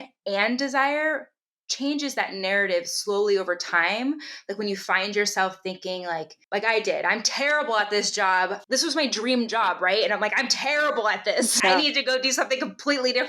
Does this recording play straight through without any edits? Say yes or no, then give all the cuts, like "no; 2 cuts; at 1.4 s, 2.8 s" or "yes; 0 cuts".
no; 2 cuts; at 8.6 s, 11.6 s